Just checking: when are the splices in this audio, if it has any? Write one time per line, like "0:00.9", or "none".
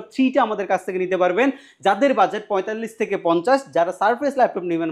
none